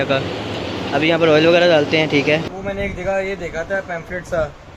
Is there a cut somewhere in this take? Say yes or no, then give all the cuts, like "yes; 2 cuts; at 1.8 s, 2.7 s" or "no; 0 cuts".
yes; 1 cut; at 2.5 s